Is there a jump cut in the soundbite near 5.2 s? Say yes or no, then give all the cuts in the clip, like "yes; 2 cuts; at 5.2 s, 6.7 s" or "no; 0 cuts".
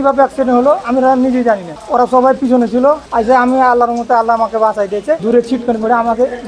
yes; 3 cuts; at 1.7 s, 3.1 s, 5.2 s